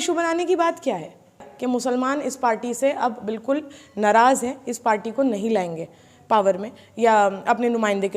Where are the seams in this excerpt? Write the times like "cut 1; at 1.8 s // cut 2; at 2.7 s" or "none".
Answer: cut 1; at 1.5 s